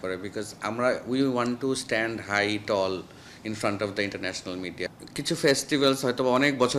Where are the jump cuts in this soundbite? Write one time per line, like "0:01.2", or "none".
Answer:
0:04.9